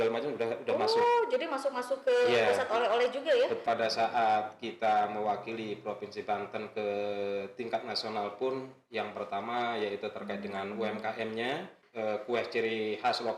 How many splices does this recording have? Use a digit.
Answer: 2